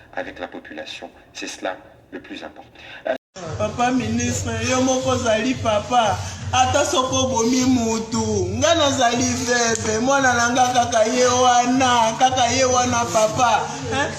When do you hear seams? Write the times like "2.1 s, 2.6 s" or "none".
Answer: 3.2 s